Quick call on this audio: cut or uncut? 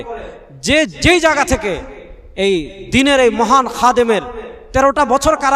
uncut